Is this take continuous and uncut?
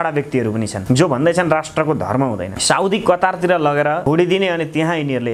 no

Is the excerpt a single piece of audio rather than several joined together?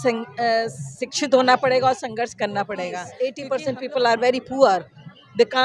no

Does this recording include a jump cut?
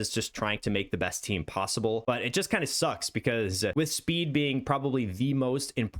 yes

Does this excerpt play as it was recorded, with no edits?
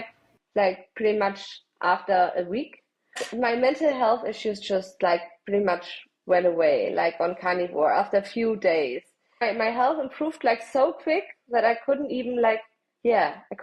no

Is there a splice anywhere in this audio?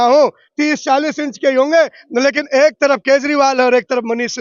no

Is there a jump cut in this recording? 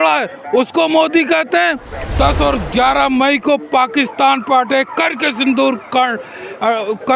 yes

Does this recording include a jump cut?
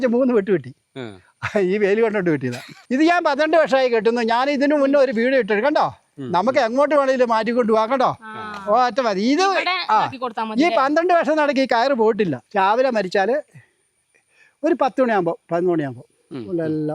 yes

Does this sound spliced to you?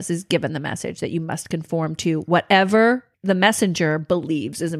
yes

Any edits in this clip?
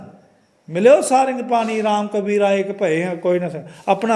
no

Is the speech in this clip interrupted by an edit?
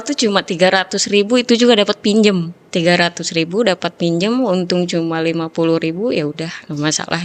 yes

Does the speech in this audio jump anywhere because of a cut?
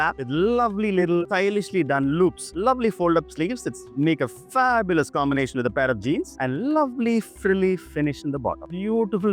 yes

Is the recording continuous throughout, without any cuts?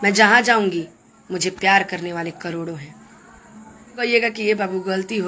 no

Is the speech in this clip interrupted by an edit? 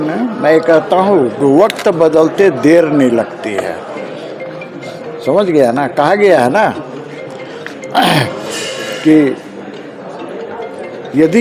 no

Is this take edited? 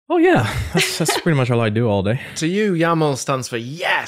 yes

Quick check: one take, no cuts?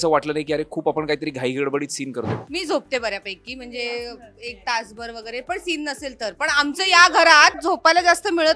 no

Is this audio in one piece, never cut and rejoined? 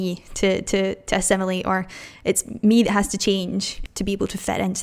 no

